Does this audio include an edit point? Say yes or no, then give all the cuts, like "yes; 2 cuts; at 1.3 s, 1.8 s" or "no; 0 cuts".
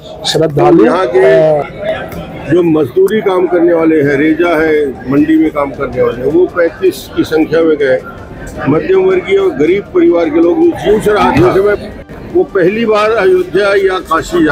yes; 2 cuts; at 1.8 s, 11.8 s